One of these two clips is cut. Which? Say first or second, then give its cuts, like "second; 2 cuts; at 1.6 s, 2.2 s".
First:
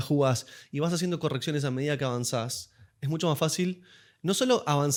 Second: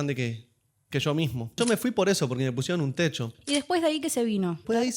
second; 2 cuts; at 1.6 s, 3.4 s